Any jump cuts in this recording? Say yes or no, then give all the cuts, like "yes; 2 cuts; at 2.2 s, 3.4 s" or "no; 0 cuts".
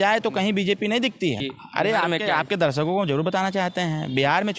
yes; 1 cut; at 1.5 s